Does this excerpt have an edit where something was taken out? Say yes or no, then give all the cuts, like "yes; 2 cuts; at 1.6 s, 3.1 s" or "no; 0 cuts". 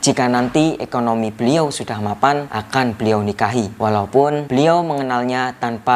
yes; 3 cuts; at 2.5 s, 3.7 s, 4.4 s